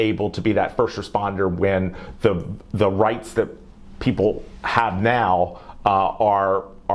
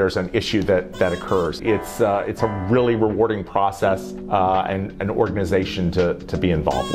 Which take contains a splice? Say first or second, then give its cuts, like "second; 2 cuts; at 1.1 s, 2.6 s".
second; 2 cuts; at 1.6 s, 4.1 s